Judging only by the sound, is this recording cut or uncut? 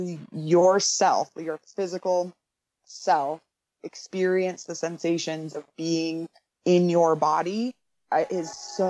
uncut